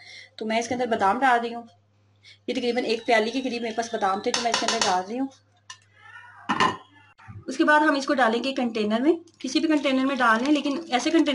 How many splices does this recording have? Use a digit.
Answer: 0